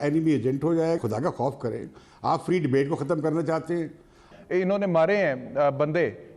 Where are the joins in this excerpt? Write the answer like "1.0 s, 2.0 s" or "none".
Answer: 1.0 s, 4.3 s